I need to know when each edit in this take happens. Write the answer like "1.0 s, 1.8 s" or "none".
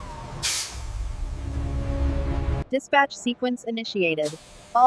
2.6 s

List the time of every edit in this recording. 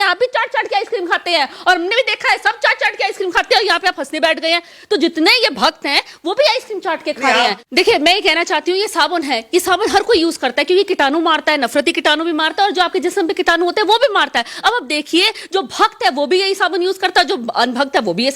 7.7 s

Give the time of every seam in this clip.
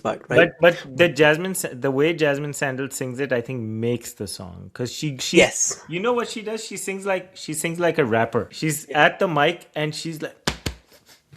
8.5 s

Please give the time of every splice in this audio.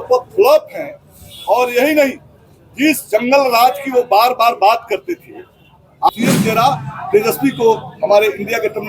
6.1 s

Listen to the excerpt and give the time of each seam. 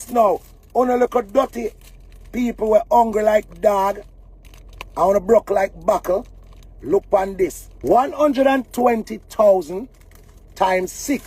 7.7 s

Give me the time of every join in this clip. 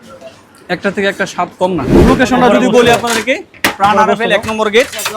1.9 s

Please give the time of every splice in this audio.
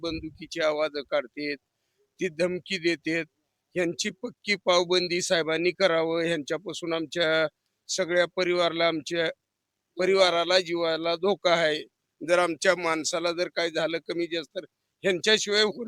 none

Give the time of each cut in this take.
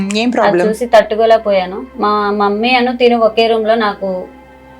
1.9 s

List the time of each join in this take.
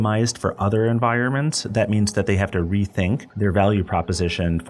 3.3 s

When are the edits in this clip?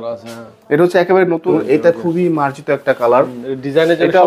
1.5 s

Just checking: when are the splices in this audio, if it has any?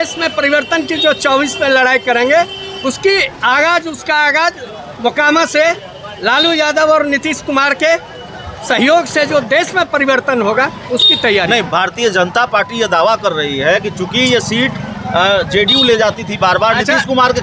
none

